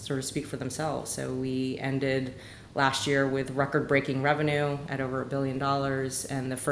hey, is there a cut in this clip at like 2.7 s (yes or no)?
no